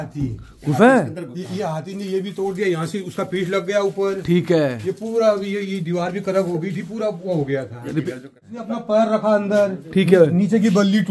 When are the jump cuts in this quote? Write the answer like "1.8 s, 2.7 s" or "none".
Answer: 8.4 s